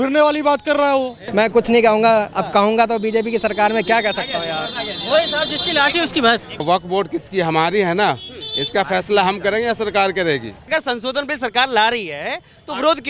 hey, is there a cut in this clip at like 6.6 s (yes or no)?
yes